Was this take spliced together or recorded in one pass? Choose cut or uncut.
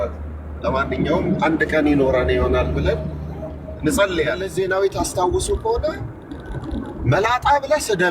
cut